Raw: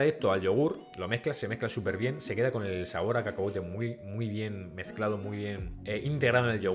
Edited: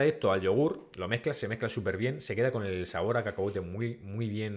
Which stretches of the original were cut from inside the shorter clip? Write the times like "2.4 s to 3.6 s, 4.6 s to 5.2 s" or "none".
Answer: none